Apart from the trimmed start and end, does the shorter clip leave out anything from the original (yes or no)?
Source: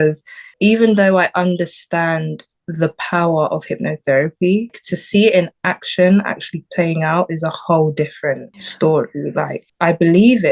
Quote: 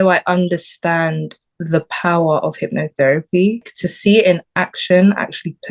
no